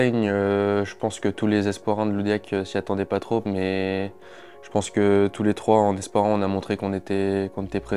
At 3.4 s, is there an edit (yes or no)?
no